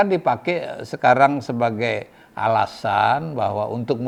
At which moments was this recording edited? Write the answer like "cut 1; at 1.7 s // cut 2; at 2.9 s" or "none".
none